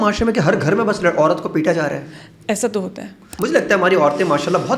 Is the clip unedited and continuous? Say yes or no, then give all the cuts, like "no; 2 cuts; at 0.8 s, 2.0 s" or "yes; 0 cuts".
no; 1 cut; at 3.3 s